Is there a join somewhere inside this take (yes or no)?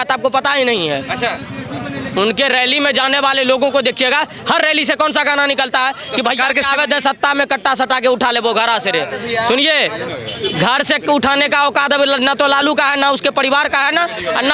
no